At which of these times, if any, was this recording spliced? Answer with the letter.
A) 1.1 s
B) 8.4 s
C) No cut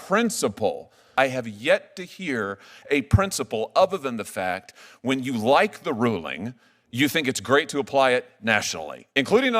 A